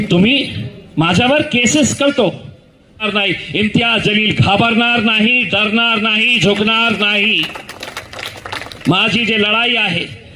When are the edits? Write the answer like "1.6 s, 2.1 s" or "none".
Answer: 3.0 s